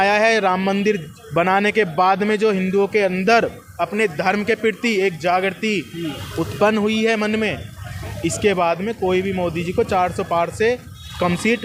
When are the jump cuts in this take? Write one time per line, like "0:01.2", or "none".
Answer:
none